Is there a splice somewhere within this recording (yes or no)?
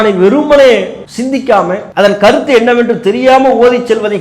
yes